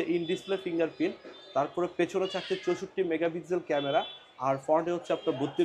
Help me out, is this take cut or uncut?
uncut